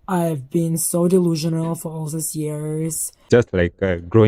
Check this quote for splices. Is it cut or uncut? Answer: cut